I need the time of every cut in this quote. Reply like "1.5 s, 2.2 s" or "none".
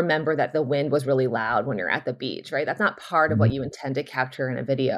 none